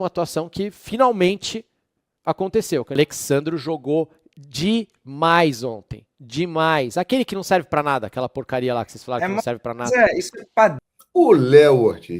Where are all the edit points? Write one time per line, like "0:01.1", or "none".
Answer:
0:03.0
0:10.8